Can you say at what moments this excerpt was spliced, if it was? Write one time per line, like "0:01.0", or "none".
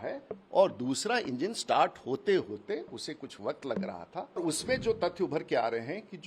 0:04.4